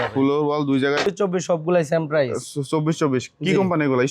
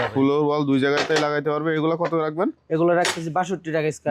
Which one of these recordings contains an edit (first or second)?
first